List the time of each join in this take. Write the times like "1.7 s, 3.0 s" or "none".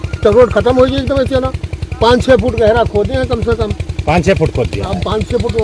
none